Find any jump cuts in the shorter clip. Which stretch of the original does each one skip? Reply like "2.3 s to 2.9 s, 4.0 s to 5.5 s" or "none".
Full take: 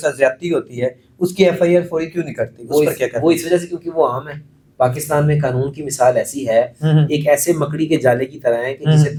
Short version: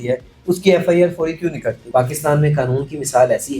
2.4 s to 4.6 s